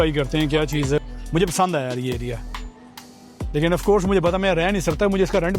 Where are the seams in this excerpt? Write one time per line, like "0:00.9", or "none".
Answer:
0:01.0